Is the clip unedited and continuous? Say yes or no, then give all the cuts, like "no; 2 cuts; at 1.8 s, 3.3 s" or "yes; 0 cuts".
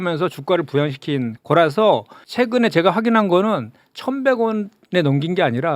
no; 1 cut; at 2.0 s